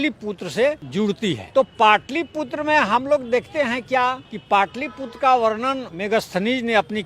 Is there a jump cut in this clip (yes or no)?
yes